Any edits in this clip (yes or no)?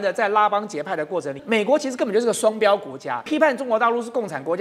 yes